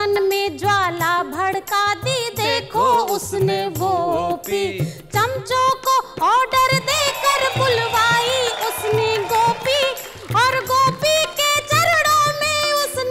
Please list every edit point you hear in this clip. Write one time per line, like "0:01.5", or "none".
0:07.1